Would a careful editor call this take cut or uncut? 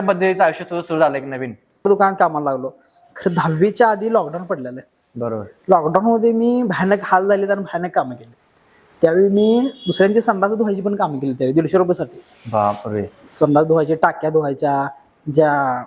cut